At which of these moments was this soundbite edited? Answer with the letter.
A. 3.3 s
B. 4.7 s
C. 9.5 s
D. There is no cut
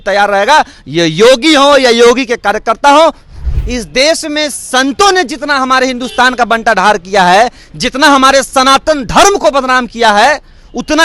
A